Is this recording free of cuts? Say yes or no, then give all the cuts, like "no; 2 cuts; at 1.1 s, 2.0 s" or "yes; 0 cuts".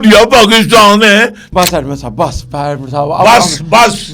no; 1 cut; at 1.4 s